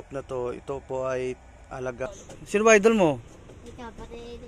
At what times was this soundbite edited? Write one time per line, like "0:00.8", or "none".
0:02.1